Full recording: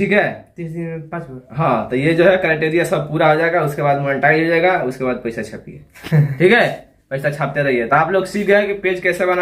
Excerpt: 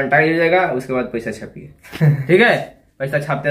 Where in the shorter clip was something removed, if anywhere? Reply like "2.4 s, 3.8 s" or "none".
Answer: none